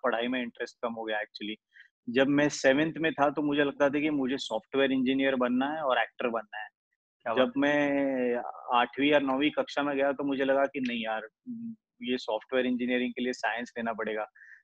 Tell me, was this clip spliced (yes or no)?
no